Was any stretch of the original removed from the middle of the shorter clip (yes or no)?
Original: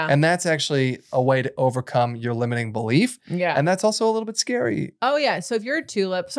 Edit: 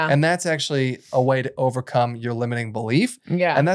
no